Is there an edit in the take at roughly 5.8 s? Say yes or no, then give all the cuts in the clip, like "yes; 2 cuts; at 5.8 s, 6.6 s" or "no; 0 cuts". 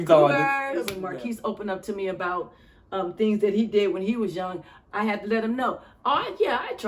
no; 1 cut; at 1.0 s